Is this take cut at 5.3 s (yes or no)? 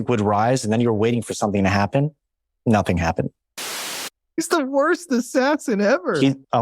no